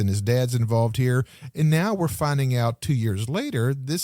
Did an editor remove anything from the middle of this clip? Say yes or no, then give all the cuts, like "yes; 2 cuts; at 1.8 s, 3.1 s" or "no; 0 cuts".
no; 0 cuts